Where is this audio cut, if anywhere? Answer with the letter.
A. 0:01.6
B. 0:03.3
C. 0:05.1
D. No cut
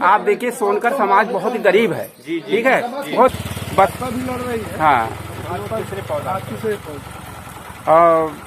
B